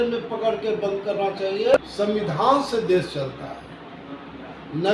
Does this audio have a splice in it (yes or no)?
yes